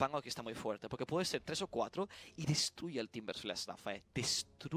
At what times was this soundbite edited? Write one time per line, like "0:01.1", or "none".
none